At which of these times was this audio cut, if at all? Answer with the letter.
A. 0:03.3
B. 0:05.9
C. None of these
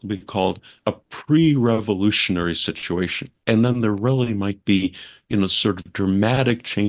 A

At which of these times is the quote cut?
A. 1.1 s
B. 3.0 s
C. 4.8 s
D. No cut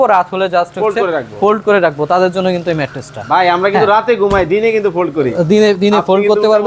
D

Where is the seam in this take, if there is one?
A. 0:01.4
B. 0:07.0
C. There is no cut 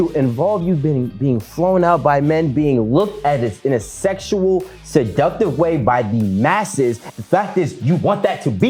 B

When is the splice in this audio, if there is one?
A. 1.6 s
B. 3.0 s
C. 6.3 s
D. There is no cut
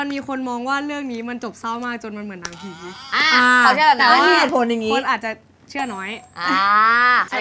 D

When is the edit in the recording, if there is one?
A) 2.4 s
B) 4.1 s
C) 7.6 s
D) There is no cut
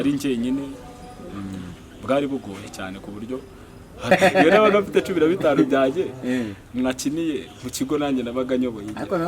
B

